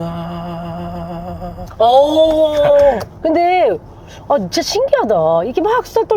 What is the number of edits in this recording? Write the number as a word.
two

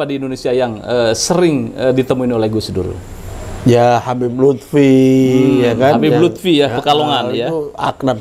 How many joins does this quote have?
zero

